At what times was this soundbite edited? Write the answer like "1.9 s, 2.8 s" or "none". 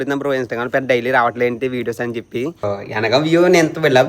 2.8 s